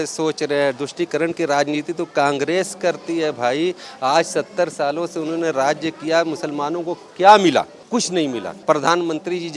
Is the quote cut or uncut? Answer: cut